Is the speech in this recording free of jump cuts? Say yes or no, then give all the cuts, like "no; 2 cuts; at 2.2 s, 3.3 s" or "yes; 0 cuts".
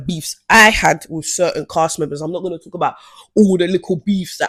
yes; 0 cuts